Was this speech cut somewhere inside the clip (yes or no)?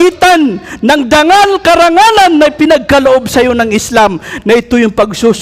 no